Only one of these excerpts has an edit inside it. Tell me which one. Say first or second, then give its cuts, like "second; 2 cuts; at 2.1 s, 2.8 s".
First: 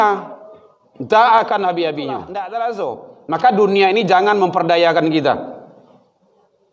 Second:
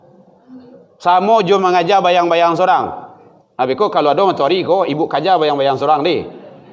first; 1 cut; at 2.3 s